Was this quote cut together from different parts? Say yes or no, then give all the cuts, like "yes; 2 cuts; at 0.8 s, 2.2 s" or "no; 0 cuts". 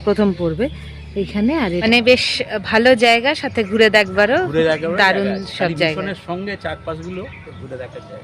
yes; 1 cut; at 1.8 s